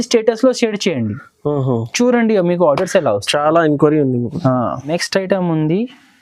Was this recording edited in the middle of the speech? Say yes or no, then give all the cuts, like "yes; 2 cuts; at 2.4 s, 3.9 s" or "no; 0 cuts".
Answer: yes; 1 cut; at 4.8 s